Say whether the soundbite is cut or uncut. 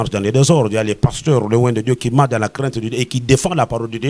uncut